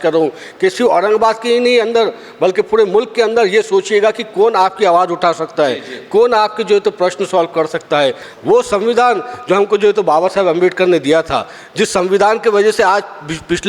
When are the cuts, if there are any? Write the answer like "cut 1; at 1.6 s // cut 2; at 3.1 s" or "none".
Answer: cut 1; at 8.3 s